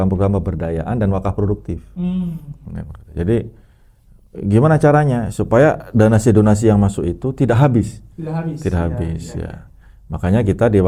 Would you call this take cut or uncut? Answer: uncut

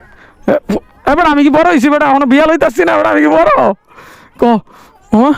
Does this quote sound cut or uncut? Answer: uncut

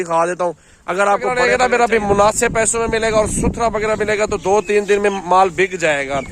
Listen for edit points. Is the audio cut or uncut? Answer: cut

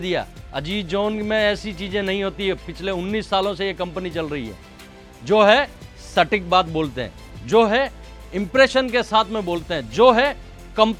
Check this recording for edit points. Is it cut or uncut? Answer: uncut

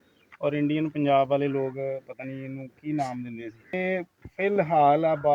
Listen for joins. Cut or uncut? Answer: uncut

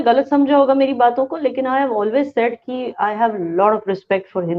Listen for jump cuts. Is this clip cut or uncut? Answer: uncut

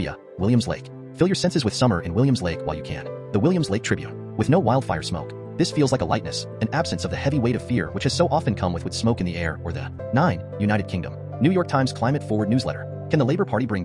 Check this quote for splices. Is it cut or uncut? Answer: uncut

